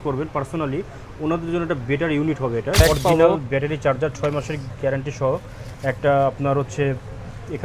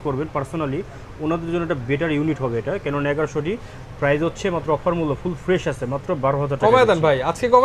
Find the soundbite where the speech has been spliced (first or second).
first